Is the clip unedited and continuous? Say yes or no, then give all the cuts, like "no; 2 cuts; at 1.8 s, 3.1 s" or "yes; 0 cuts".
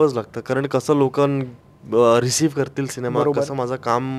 yes; 0 cuts